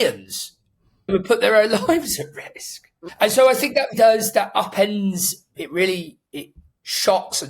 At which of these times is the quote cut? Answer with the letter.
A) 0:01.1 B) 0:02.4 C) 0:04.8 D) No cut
A